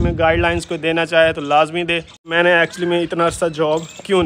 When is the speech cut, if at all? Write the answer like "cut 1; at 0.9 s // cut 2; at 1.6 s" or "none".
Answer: cut 1; at 2.2 s